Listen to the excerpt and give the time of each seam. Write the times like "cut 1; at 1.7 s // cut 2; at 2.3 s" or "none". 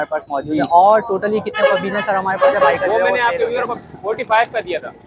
cut 1; at 2.7 s